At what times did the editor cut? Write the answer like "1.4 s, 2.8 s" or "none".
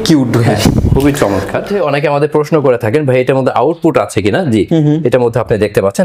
1.7 s

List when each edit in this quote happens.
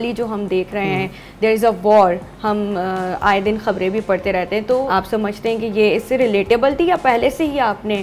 none

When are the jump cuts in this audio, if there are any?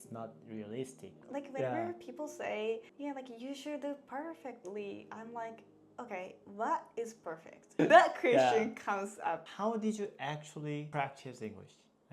7.8 s

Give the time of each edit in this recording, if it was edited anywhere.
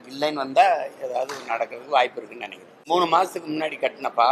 2.8 s

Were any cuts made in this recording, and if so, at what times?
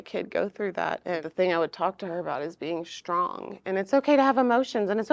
1.2 s

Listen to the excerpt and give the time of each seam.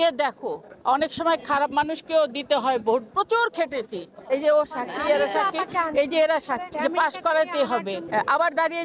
3.1 s, 6.7 s, 8.0 s

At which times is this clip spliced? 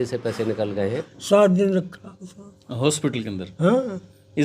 1.0 s

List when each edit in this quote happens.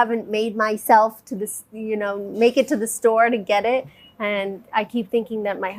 none

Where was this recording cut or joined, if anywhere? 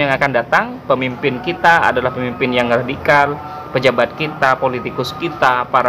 none

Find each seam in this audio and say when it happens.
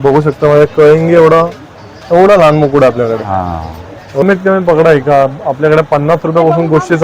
4.2 s

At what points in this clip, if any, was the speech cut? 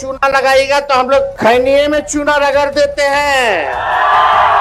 1.3 s

